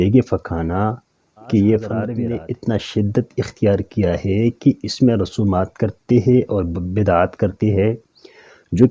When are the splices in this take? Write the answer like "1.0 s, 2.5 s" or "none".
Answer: 2.1 s